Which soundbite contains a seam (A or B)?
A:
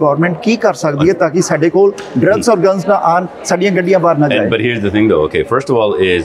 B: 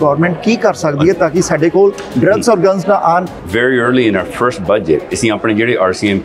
B